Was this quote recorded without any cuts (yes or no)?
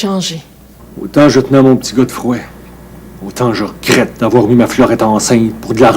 no